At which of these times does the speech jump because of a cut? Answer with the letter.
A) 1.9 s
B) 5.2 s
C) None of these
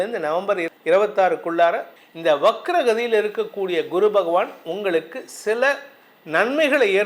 A